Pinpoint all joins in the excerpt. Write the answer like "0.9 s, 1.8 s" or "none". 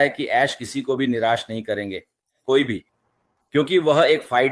none